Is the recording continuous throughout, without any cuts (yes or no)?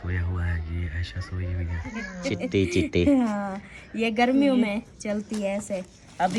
no